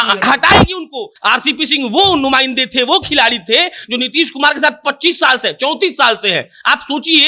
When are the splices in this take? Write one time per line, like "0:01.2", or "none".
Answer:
0:01.1